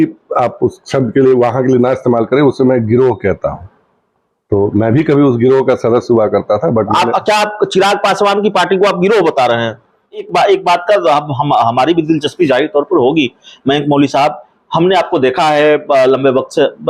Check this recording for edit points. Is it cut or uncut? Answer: cut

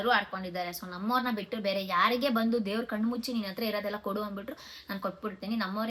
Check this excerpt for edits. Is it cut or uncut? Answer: uncut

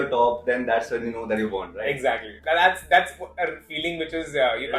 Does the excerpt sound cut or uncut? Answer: uncut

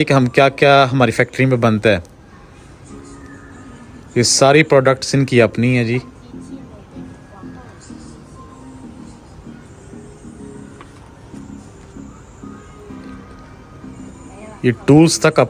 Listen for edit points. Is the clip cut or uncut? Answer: uncut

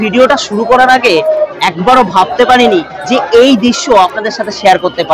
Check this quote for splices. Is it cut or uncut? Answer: uncut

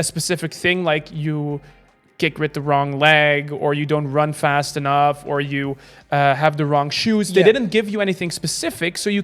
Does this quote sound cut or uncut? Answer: uncut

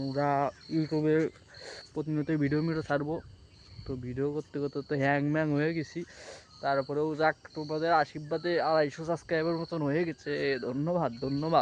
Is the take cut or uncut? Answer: uncut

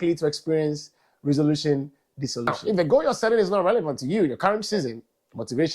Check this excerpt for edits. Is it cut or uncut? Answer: cut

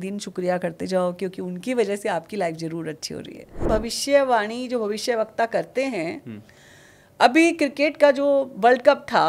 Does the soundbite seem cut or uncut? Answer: cut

